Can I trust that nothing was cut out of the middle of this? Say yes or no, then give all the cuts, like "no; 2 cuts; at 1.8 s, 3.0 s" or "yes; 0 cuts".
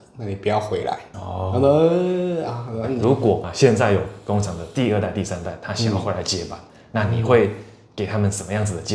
no; 1 cut; at 2.9 s